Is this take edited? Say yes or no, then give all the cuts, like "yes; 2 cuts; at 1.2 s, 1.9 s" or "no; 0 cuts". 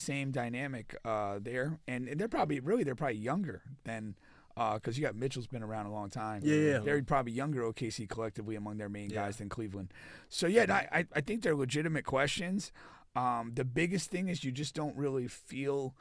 no; 0 cuts